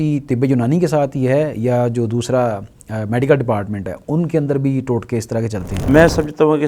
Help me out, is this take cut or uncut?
cut